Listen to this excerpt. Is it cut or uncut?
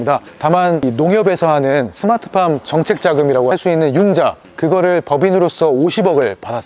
uncut